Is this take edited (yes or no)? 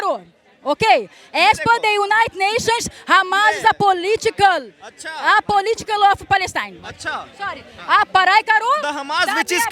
no